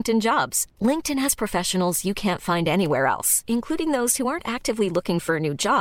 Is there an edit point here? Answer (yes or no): no